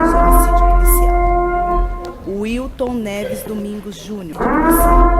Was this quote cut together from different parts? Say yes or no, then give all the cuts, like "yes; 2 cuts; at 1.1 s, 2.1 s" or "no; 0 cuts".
yes; 2 cuts; at 2.0 s, 3.9 s